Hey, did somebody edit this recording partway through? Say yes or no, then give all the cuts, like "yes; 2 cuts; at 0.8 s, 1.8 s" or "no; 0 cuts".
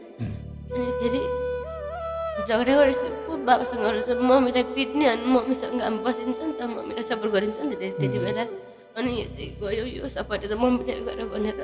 no; 0 cuts